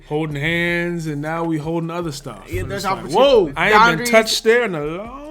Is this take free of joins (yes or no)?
no